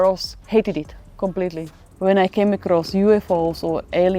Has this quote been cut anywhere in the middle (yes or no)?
yes